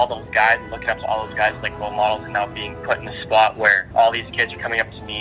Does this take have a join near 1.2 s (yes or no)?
no